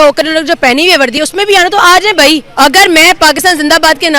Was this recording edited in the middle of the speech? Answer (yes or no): yes